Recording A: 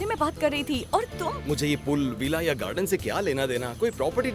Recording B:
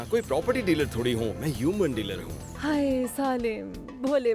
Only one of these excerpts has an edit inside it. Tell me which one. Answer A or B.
B